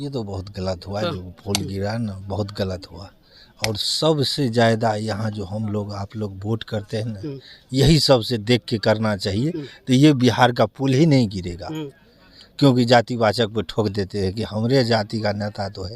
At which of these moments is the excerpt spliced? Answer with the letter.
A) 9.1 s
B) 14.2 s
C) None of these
C